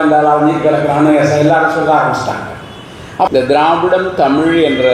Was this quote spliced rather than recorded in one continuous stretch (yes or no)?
yes